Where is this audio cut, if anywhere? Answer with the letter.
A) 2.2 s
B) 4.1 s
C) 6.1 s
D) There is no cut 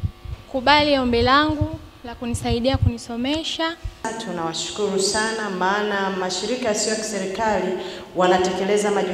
B